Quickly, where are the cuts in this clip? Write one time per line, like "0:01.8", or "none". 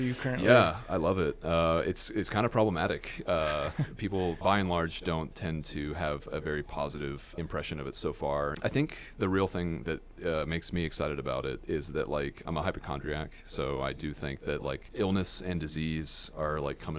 0:04.4
0:07.3
0:08.5
0:12.4
0:14.9